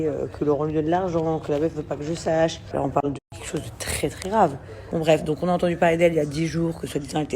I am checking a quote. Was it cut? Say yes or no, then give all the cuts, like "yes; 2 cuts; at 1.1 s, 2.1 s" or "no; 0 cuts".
yes; 2 cuts; at 2.7 s, 4.7 s